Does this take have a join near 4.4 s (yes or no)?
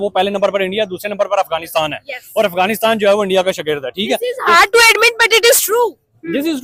no